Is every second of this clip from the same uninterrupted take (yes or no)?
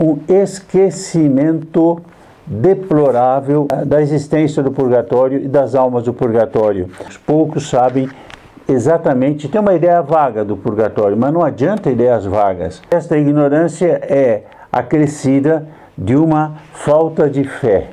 no